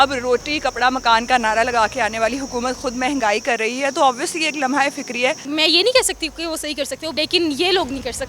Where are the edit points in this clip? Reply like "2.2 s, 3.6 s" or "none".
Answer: 5.4 s, 7.2 s